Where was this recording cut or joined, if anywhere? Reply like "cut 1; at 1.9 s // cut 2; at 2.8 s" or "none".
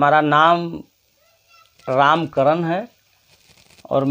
none